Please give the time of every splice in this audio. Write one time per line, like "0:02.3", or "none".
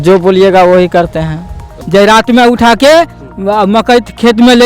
0:01.7